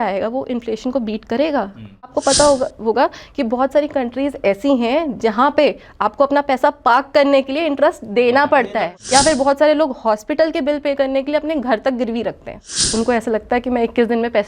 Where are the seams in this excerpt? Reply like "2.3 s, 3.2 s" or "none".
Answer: 2.1 s, 9.0 s, 12.8 s